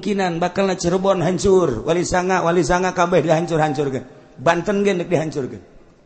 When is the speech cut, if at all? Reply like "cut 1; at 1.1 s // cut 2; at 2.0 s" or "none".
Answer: none